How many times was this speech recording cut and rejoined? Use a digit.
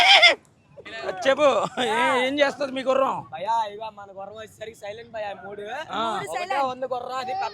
1